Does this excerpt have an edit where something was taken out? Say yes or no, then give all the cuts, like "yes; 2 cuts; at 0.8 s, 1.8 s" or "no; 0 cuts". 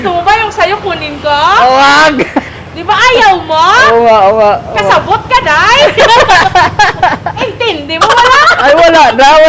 yes; 1 cut; at 7.3 s